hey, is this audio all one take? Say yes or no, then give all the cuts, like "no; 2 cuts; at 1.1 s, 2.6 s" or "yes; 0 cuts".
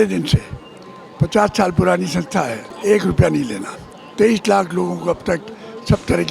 no; 1 cut; at 2.7 s